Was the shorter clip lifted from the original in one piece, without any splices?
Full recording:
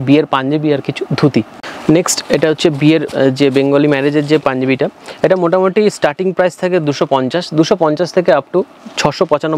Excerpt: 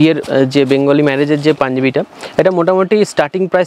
yes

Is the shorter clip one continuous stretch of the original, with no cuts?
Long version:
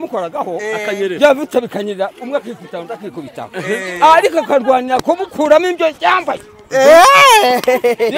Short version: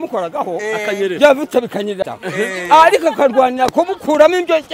no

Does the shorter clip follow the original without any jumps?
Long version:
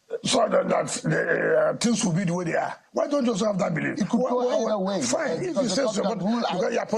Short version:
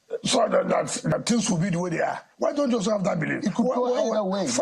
no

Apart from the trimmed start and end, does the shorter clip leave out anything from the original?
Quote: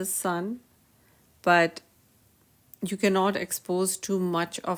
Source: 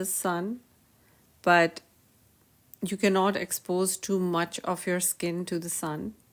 no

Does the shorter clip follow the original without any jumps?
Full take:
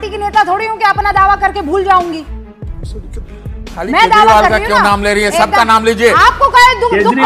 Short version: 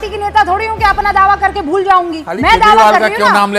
no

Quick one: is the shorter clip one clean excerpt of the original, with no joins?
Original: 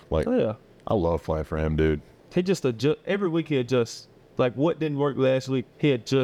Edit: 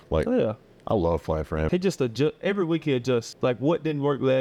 no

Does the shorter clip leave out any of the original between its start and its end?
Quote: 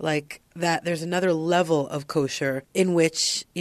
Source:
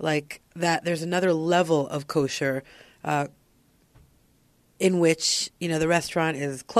yes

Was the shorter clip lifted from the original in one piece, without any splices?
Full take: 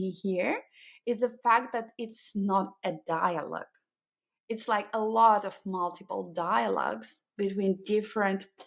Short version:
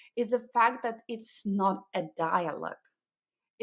yes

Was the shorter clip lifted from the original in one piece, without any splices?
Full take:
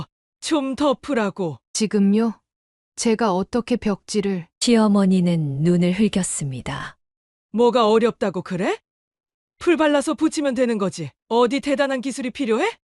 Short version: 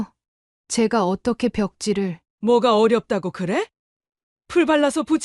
no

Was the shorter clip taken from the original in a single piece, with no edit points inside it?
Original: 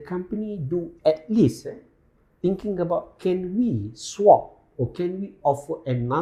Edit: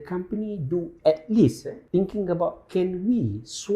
no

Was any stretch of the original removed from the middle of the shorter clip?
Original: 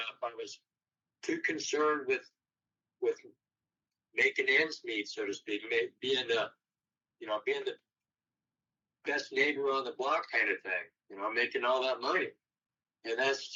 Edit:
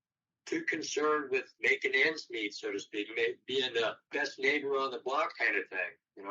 yes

